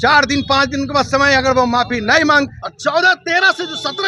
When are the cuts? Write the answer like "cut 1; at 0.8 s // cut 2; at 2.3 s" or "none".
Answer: cut 1; at 2.6 s

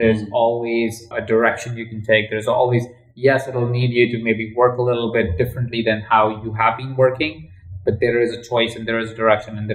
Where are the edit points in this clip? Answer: cut 1; at 1.1 s // cut 2; at 7.7 s

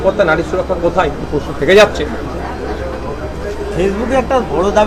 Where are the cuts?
none

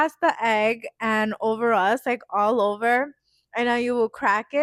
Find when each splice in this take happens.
none

